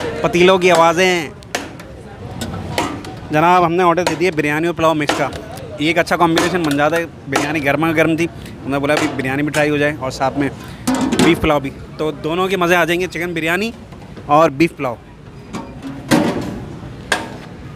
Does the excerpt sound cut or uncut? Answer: cut